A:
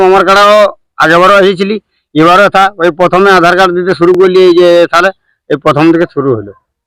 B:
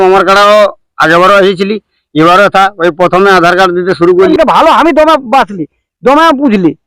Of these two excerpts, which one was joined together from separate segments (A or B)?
B